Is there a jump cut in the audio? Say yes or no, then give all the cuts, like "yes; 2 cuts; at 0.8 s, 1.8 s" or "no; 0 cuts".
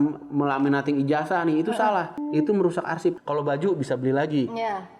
yes; 2 cuts; at 2.2 s, 3.2 s